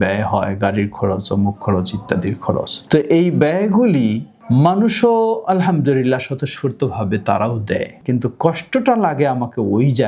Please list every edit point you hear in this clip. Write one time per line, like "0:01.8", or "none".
0:02.8
0:04.3
0:08.0